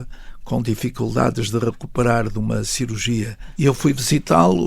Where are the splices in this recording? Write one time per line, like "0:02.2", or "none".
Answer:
0:03.4